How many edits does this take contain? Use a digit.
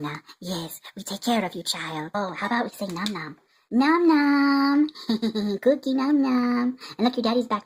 1